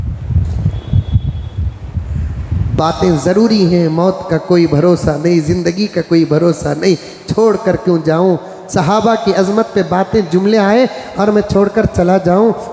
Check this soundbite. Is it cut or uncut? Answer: uncut